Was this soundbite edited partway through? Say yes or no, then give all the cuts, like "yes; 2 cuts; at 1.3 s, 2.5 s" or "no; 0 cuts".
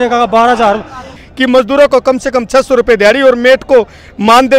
yes; 1 cut; at 1.2 s